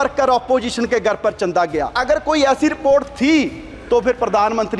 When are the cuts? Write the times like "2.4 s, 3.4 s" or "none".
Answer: 2.0 s